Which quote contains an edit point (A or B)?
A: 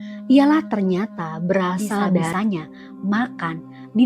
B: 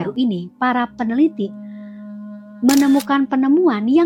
A